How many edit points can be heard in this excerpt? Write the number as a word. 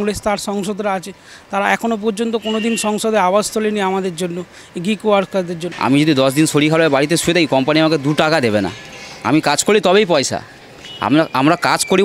one